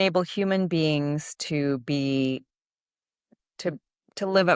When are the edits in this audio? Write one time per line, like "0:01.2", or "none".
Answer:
none